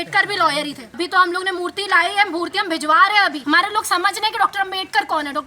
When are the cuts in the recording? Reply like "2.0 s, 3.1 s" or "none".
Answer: 0.9 s, 3.4 s